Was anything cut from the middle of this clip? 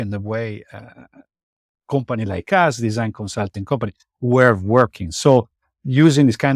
no; 0 cuts

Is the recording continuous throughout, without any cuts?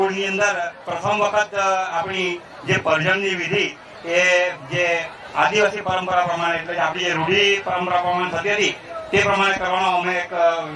yes; 0 cuts

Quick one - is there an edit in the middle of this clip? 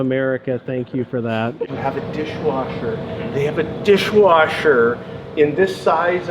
yes; 1 cut; at 1.7 s

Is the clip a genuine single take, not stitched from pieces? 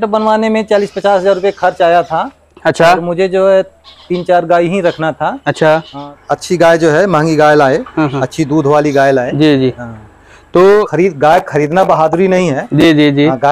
no; 2 cuts; at 6.0 s, 10.9 s

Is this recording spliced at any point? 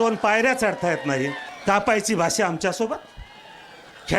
yes; 1 cut; at 1.5 s

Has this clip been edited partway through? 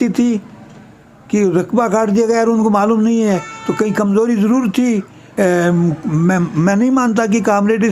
yes; 1 cut; at 5.2 s

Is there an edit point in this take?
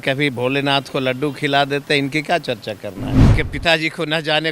yes; 1 cut; at 3.1 s

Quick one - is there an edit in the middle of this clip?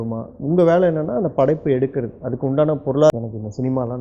yes; 1 cut; at 3.1 s

